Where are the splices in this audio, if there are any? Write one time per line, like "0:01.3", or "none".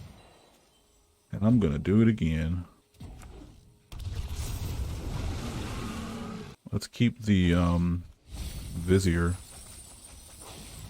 0:02.8
0:06.6